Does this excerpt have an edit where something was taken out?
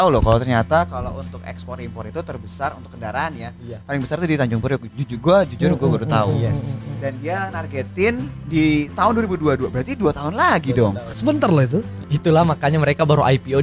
yes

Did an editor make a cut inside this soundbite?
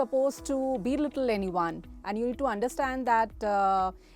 no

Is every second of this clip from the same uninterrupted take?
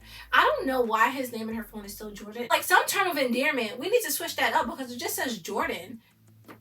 no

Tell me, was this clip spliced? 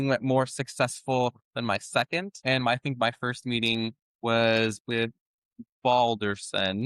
yes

